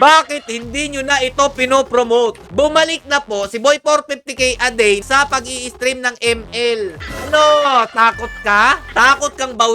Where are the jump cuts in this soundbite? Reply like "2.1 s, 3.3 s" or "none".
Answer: 2.4 s, 5.0 s, 7.1 s, 8.8 s